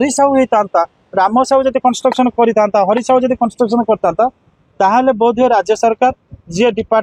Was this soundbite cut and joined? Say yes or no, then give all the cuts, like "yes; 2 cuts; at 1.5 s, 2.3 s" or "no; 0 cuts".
no; 0 cuts